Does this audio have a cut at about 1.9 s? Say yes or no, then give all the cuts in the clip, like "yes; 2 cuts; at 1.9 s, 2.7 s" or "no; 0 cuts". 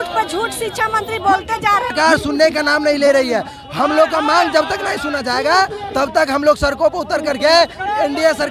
yes; 1 cut; at 1.9 s